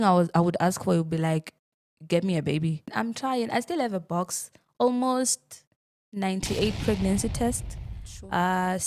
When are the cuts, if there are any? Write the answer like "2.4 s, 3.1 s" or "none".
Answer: 2.9 s